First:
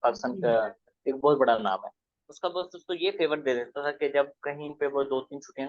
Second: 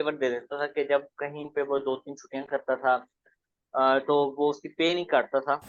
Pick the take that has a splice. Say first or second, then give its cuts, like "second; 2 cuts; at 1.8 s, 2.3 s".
first; 1 cut; at 2.2 s